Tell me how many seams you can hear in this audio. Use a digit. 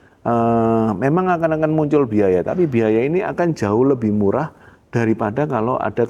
0